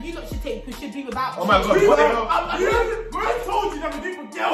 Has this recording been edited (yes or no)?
no